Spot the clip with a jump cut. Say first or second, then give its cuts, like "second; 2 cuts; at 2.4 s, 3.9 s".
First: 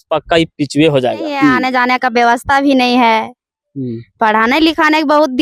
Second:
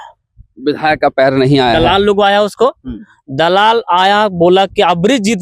first; 1 cut; at 1.6 s